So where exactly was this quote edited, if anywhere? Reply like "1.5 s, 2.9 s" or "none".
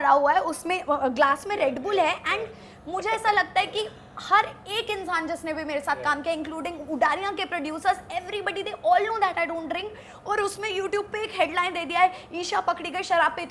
none